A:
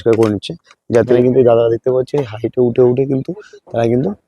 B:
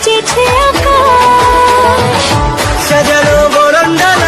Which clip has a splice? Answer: A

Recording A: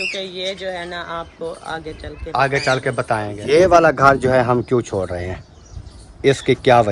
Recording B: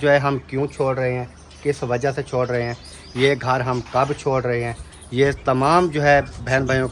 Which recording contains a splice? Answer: A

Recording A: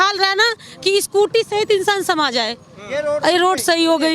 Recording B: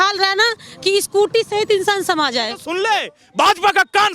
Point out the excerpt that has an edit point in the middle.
B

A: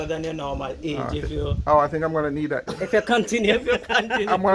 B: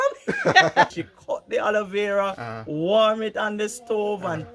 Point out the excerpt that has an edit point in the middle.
B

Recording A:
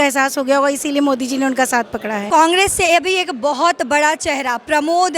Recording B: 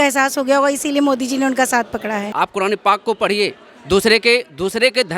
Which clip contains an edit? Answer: B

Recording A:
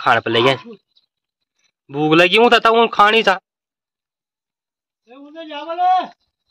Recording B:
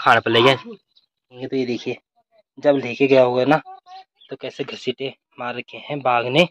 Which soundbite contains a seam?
B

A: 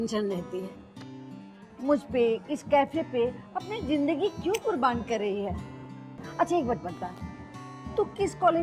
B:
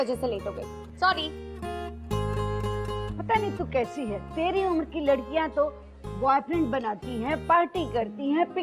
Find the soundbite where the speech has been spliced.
B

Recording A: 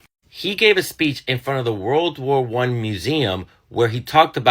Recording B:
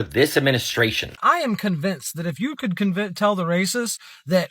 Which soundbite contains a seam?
B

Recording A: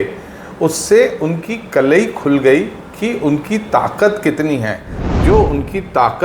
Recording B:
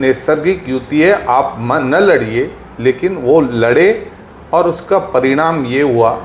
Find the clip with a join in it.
A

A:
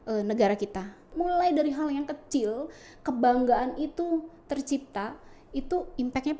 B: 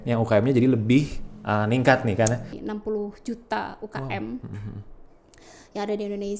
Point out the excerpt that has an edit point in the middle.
B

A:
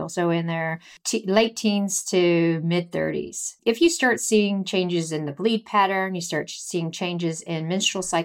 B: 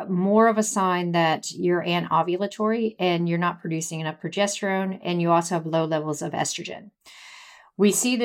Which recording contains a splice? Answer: A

